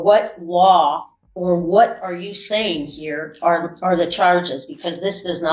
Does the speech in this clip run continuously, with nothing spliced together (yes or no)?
yes